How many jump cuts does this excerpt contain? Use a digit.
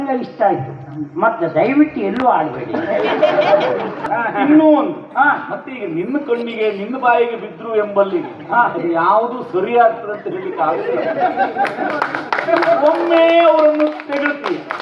1